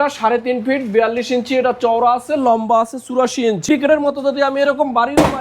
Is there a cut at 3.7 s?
yes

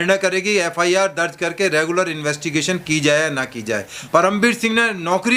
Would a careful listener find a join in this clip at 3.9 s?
yes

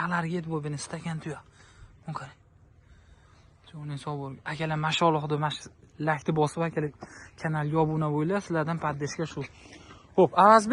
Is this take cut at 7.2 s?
no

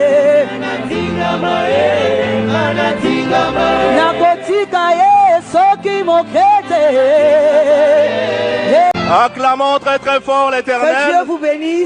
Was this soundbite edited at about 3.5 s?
no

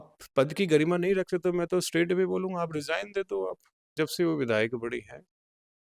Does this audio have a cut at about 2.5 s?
no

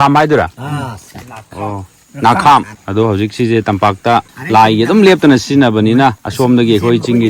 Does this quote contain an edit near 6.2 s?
yes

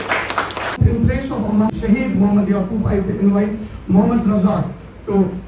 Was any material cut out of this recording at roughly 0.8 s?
yes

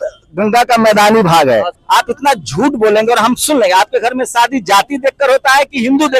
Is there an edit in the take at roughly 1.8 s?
yes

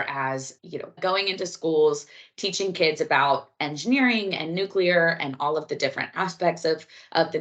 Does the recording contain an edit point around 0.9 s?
yes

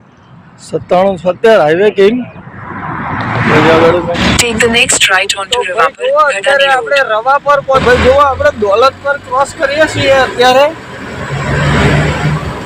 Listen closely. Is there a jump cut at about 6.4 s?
no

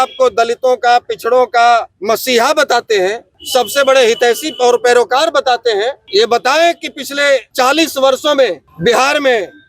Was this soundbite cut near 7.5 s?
yes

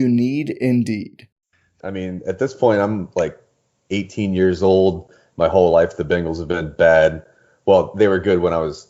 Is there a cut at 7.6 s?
no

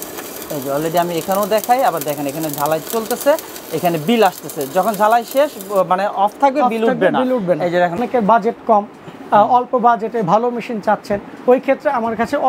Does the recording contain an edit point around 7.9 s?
yes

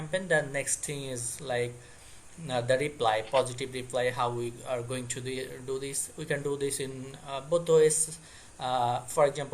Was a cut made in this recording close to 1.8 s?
no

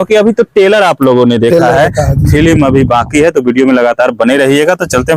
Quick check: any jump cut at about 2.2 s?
no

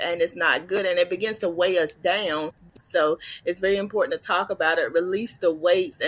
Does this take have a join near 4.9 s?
no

